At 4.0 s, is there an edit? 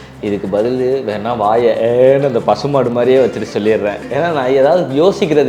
yes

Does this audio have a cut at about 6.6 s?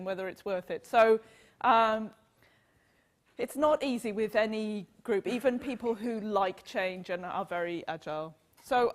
yes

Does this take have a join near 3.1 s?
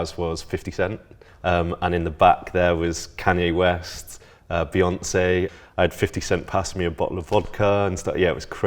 no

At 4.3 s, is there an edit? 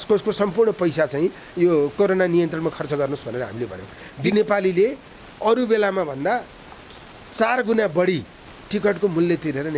yes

